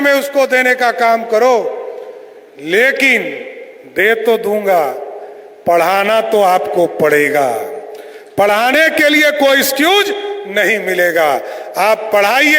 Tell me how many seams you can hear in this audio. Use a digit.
0